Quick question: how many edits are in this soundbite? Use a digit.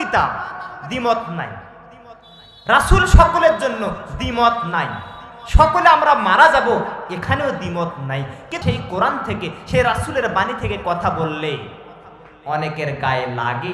1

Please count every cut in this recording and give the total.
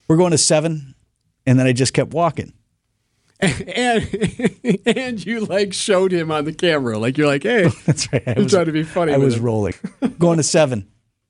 1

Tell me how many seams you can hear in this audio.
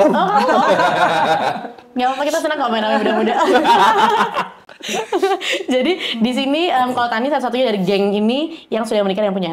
0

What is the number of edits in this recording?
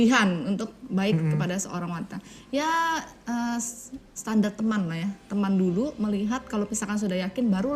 0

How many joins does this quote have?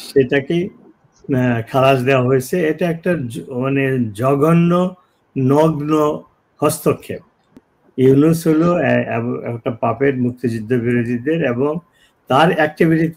1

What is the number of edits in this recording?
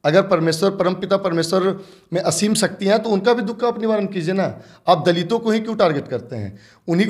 0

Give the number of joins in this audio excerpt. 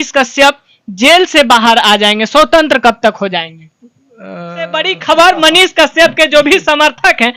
1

